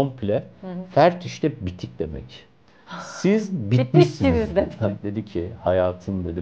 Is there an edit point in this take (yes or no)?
yes